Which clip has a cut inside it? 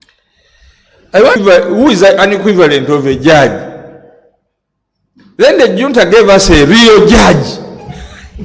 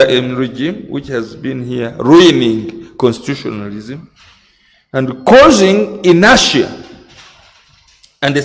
first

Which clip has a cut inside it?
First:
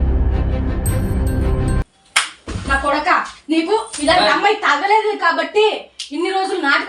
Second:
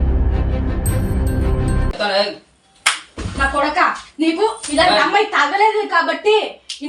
first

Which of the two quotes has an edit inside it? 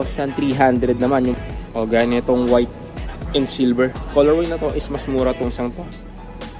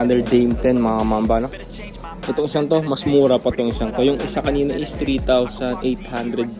first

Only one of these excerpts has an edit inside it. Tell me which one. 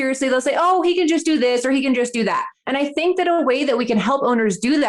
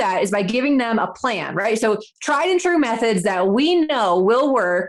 first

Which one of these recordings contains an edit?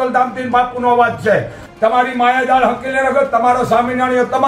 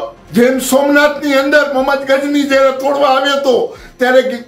first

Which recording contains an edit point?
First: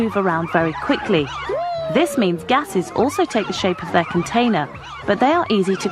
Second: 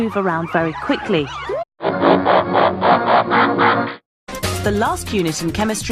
first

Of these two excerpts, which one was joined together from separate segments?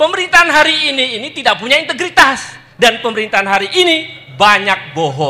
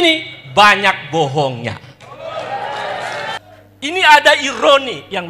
second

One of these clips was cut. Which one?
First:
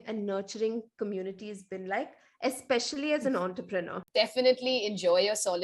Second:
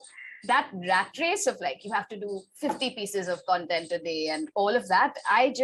first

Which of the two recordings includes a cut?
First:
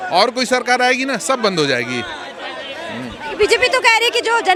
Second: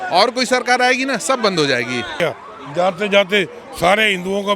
second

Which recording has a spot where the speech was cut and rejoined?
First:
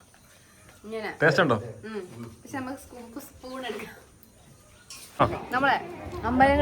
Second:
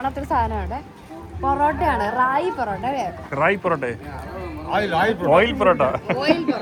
first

